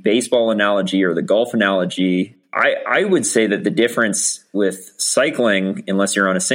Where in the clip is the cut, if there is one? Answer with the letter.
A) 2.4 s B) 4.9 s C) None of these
A